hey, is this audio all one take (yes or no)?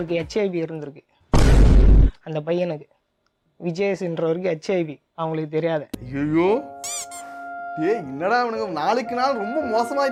yes